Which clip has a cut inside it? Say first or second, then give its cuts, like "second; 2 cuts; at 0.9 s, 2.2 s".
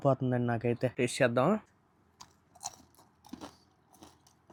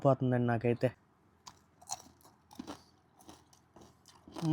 second; 1 cut; at 0.9 s